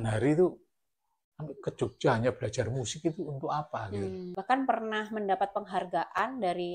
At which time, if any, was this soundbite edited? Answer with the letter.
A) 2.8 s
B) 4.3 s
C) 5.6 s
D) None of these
B